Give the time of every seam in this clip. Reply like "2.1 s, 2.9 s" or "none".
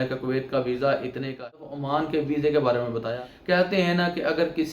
1.4 s, 3.1 s